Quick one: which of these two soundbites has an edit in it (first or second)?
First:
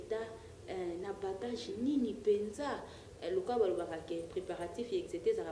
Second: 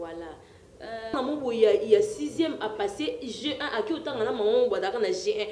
second